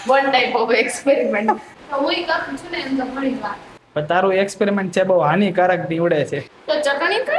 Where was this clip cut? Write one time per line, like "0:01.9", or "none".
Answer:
0:01.7
0:06.5